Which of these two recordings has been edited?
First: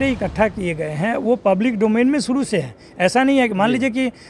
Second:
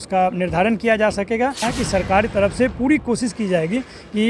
second; 1 cut; at 1.6 s

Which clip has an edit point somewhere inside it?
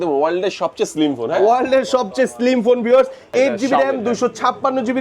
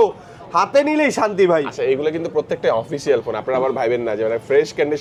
first; 1 cut; at 3.2 s

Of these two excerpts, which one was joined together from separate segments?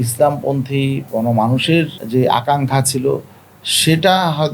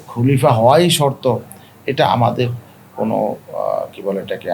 first; 2 cuts; at 1.0 s, 2.0 s

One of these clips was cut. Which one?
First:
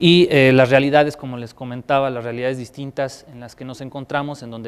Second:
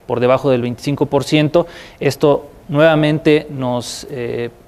first; 1 cut; at 2.0 s

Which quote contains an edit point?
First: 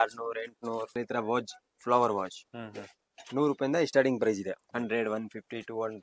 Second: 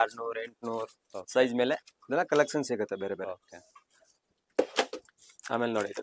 first; 2 cuts; at 0.9 s, 4.6 s

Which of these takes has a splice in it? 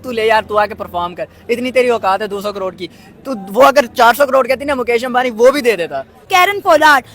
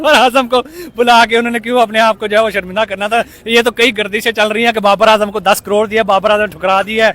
first; 1 cut; at 6.3 s

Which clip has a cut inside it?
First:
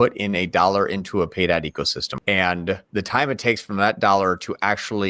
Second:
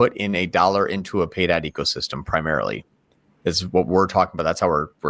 first; 2 cuts; at 2.1 s, 2.8 s

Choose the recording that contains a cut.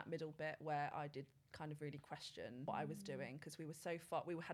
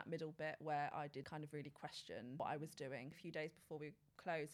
second; 2 cuts; at 1.3 s, 3.2 s

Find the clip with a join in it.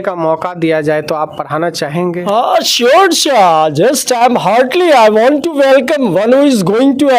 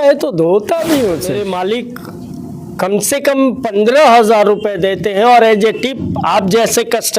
second; 1 cut; at 1.3 s

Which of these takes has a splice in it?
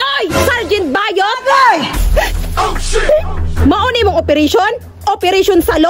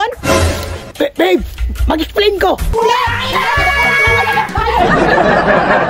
second; 2 cuts; at 2.7 s, 4.8 s

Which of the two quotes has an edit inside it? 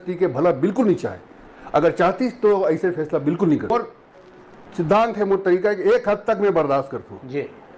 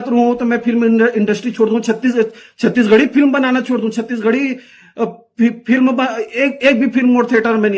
first; 1 cut; at 3.7 s

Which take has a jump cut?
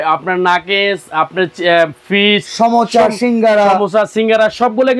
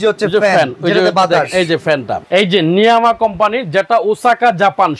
second; 1 cut; at 2.1 s

